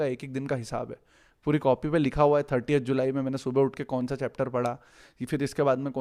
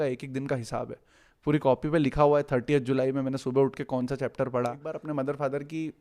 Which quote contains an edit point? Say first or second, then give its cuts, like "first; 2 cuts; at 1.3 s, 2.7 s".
second; 1 cut; at 4.9 s